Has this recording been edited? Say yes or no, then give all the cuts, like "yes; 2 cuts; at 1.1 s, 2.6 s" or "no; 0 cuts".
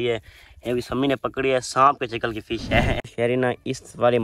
yes; 1 cut; at 3.1 s